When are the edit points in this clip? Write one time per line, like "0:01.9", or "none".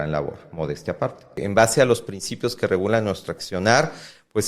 0:01.4
0:03.3